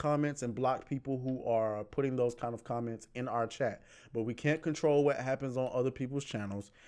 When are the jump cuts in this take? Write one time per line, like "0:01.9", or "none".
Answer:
none